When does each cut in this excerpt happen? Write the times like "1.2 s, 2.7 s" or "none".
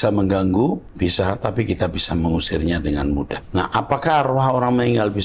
0.9 s, 3.4 s